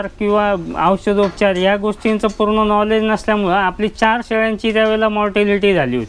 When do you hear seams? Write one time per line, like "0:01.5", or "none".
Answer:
none